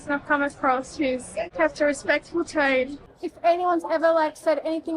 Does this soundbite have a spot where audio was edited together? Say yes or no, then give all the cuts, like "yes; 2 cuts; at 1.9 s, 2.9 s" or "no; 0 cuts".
yes; 2 cuts; at 1.5 s, 3.2 s